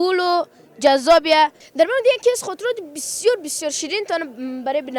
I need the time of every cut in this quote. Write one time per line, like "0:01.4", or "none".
0:01.6